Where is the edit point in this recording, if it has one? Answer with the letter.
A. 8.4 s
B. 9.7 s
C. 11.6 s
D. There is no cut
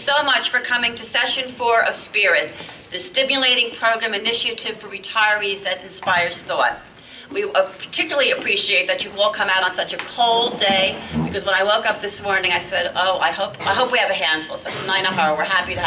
D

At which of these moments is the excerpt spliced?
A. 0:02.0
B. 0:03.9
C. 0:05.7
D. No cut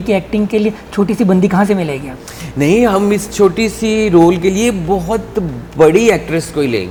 D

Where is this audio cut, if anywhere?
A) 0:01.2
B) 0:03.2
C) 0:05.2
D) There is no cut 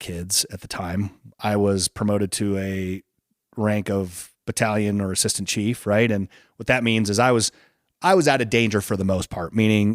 A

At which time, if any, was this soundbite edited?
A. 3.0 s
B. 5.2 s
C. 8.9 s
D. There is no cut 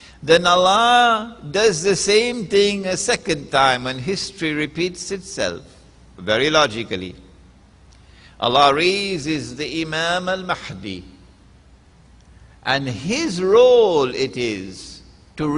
A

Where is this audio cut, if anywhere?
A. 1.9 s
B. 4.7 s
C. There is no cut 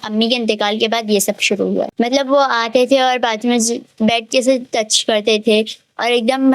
A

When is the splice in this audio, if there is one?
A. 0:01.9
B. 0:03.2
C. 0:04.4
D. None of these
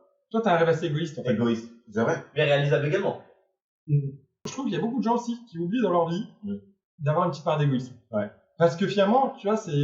C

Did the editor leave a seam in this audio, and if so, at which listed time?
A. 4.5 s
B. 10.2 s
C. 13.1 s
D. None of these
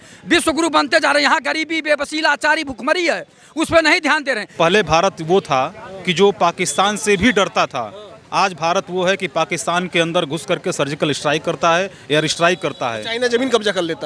A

